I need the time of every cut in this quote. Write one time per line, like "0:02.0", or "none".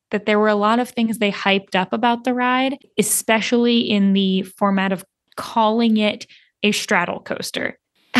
0:02.8